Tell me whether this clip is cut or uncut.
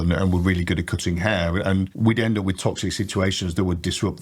cut